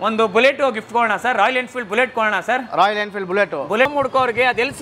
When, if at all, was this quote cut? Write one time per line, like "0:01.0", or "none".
0:03.9